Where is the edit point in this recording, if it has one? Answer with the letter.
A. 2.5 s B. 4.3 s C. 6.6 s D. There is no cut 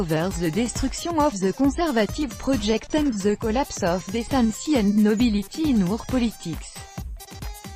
C